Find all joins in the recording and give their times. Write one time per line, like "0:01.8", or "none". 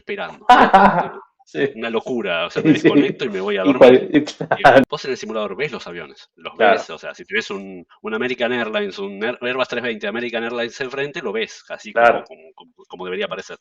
0:04.8